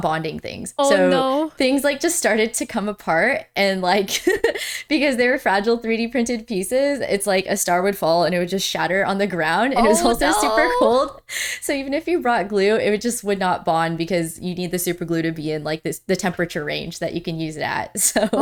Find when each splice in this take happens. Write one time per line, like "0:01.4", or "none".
none